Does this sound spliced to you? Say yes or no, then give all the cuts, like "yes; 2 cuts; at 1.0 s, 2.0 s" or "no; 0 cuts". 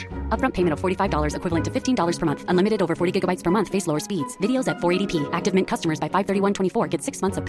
no; 0 cuts